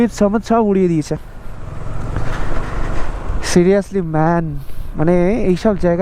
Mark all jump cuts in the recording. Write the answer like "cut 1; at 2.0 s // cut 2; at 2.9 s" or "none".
none